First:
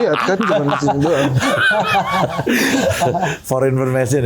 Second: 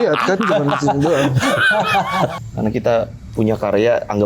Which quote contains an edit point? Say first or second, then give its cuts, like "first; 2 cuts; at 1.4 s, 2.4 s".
second; 1 cut; at 2.4 s